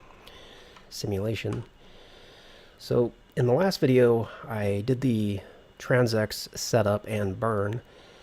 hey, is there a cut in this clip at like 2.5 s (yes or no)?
yes